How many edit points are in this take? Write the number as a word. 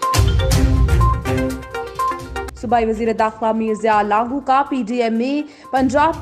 one